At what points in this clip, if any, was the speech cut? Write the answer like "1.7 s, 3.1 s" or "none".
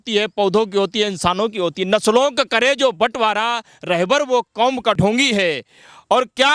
5.0 s